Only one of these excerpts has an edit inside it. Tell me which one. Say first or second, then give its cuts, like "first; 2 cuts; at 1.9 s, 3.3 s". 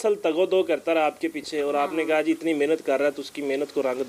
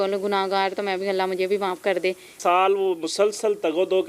second; 1 cut; at 2.3 s